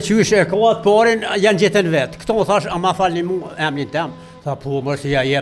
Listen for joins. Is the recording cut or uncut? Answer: uncut